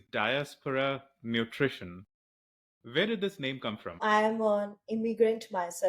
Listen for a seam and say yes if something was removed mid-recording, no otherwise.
yes